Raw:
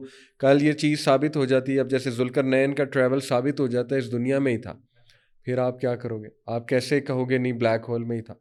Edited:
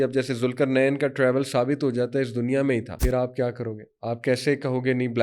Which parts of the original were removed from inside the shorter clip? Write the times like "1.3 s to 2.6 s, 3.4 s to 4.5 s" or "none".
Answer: 4.7 s to 5.4 s